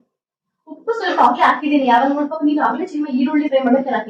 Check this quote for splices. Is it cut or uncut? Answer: uncut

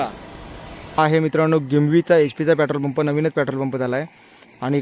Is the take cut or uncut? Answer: cut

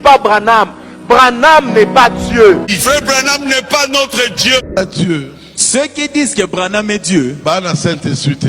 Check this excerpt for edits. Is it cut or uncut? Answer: cut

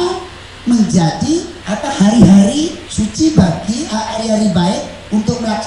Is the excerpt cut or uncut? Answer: cut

